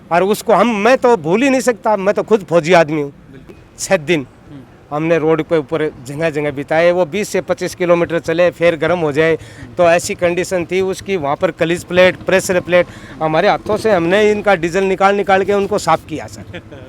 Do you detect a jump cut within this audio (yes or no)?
yes